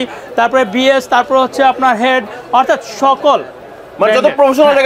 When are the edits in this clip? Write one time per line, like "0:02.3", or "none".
none